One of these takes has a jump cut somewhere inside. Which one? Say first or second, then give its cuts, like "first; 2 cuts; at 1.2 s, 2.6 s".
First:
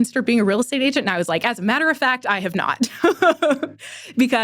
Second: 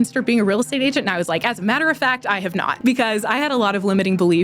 second; 1 cut; at 2.7 s